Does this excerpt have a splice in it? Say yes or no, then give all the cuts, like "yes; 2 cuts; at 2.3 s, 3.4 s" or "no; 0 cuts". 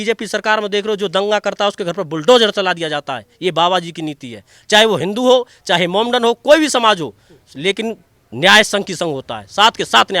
no; 0 cuts